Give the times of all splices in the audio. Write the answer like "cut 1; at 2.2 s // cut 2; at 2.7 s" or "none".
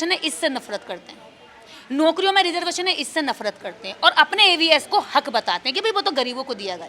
none